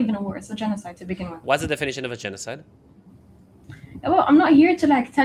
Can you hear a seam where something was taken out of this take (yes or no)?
no